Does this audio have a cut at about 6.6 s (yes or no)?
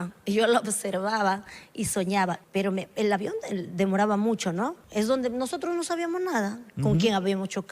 no